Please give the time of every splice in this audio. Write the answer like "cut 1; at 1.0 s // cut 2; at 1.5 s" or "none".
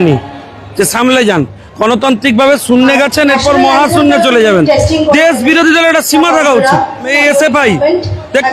cut 1; at 7.1 s